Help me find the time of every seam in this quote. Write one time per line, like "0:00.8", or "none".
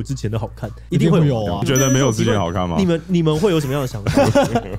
0:01.6